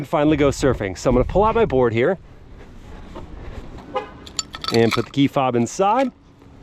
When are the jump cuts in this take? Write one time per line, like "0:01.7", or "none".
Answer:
0:03.8